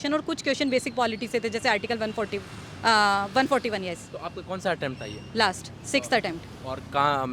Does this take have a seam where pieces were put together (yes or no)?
no